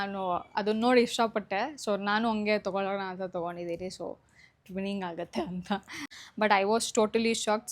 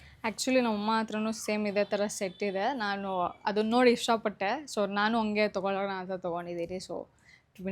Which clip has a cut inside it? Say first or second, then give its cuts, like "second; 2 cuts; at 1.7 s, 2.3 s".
first; 1 cut; at 6.2 s